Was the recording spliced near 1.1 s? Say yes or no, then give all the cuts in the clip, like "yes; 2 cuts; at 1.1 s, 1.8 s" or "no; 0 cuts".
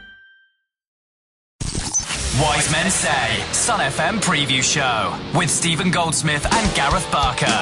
yes; 1 cut; at 1.1 s